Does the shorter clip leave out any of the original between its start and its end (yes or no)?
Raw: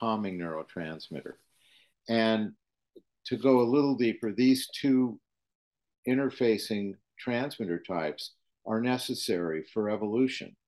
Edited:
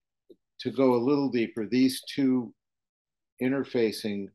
no